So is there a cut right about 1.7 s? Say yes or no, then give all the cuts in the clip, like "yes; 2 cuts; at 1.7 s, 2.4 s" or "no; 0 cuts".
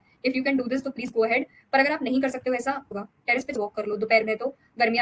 no; 2 cuts; at 3.1 s, 4.2 s